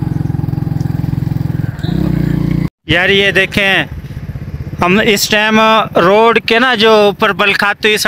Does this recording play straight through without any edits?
no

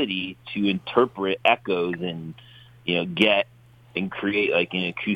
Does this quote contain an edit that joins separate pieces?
no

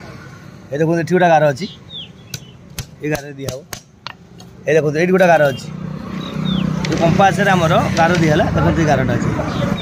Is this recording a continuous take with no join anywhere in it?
yes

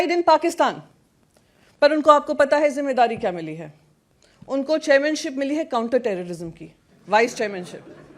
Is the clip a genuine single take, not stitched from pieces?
yes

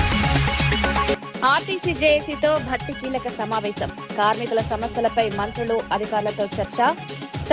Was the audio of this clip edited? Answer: yes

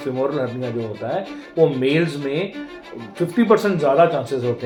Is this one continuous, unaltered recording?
yes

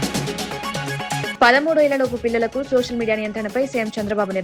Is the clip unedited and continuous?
no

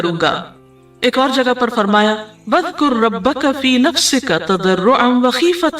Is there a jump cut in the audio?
yes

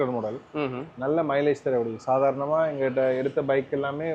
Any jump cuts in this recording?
no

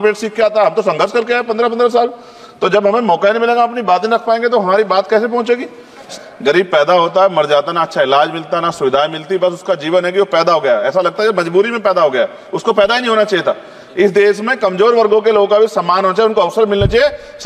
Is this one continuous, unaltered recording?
no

